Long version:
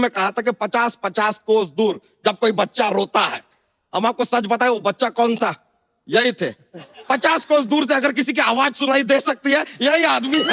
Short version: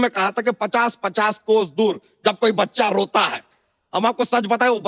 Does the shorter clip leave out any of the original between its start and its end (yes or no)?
no